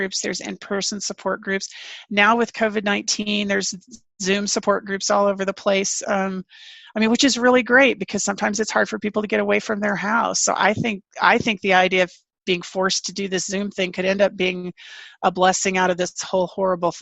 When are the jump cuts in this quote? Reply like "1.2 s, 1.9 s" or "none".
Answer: none